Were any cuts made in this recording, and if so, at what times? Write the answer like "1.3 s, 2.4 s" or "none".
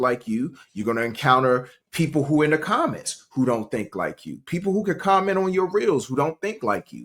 none